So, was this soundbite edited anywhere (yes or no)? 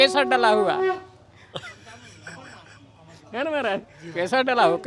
no